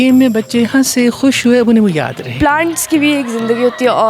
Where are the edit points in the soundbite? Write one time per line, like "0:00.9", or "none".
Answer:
0:02.3